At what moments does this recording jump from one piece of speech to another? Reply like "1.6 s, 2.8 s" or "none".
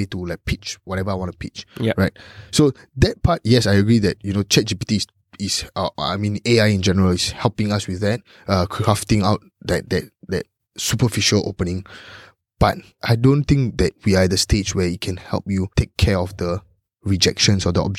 12.9 s, 14.0 s, 15.7 s